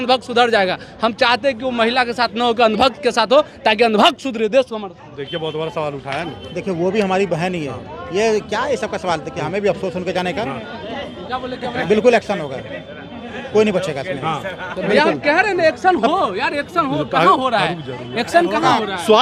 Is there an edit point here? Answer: no; 0 cuts

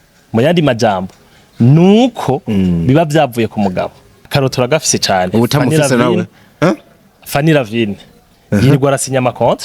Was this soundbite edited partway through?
yes; 1 cut; at 4.3 s

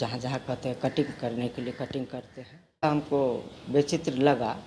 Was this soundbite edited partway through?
yes; 1 cut; at 2.8 s

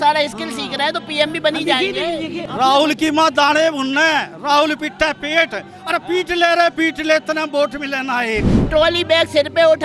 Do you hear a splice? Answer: yes; 2 cuts; at 2.4 s, 8.5 s

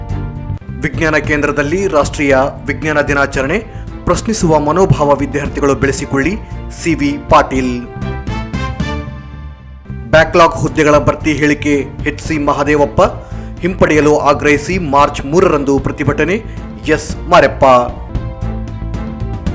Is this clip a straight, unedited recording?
yes; 0 cuts

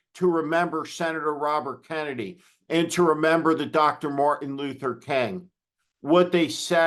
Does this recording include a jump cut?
no; 0 cuts

